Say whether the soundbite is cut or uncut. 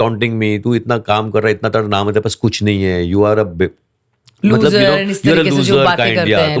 uncut